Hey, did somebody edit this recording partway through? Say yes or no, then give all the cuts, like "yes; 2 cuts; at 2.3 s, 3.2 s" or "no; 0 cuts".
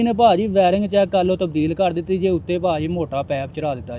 no; 0 cuts